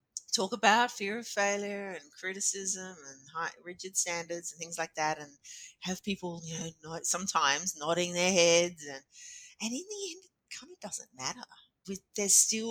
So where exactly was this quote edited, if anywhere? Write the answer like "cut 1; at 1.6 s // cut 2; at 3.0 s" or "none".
cut 1; at 11.8 s